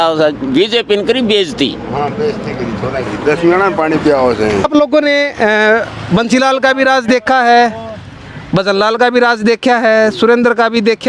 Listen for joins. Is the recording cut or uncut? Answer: uncut